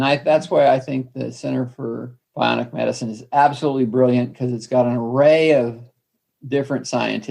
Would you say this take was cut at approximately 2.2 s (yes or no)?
yes